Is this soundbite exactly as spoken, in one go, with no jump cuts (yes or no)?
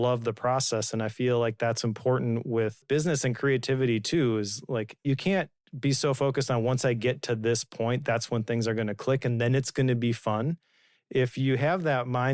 no